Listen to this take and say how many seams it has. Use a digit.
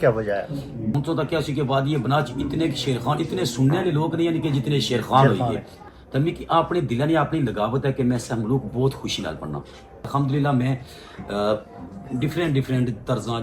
3